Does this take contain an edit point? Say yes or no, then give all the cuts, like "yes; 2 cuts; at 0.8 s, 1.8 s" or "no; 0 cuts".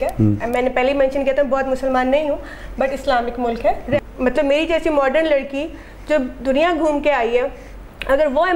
yes; 1 cut; at 4.0 s